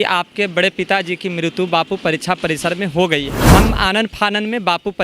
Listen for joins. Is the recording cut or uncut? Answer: cut